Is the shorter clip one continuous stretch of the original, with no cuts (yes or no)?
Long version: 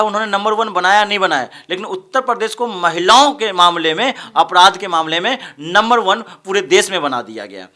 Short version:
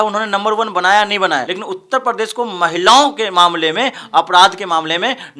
no